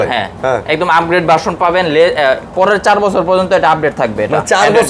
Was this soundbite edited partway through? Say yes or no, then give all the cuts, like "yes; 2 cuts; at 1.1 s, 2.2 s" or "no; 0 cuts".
no; 0 cuts